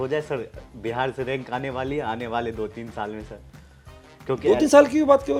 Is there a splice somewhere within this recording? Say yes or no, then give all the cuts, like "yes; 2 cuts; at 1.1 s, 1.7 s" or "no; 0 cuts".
no; 0 cuts